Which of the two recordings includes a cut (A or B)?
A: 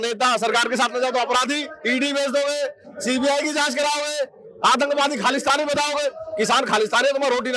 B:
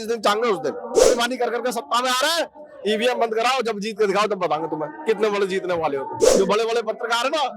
B